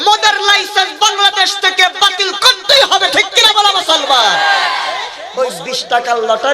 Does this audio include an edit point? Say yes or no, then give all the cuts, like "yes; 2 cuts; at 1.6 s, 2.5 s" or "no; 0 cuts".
yes; 1 cut; at 5.2 s